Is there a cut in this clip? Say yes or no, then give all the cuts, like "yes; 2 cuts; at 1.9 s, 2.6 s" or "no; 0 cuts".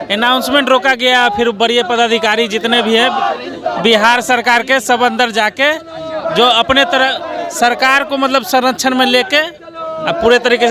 no; 0 cuts